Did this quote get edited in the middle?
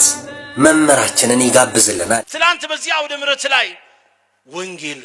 yes; 1 cut; at 2.2 s

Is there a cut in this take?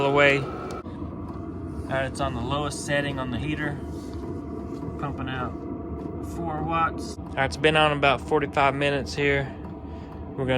yes; 2 cuts; at 0.8 s, 7.1 s

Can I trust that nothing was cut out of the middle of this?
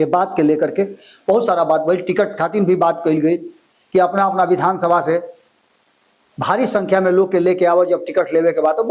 yes; 0 cuts

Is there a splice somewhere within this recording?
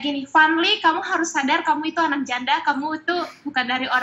no; 0 cuts

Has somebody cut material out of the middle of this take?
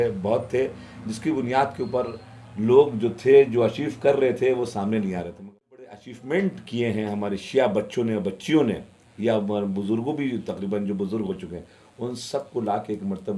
yes; 1 cut; at 5.6 s

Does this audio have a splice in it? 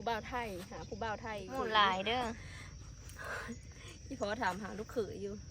yes; 1 cut; at 1.5 s

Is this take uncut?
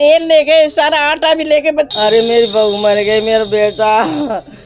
no; 1 cut; at 1.9 s

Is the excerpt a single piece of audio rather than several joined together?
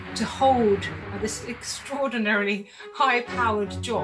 yes; 0 cuts

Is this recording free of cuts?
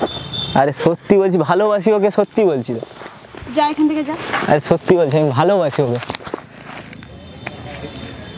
yes; 0 cuts

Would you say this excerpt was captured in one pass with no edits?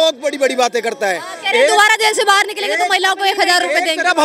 yes; 0 cuts

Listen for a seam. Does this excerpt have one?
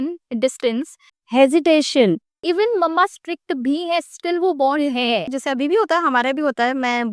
no; 0 cuts

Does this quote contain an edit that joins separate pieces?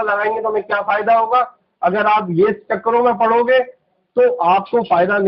no; 0 cuts

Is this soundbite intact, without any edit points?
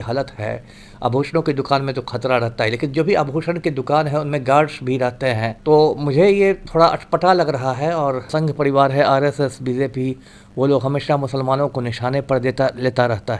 no; 2 cuts; at 5.5 s, 8.2 s

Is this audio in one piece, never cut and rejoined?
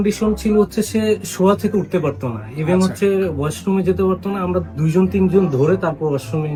yes; 0 cuts

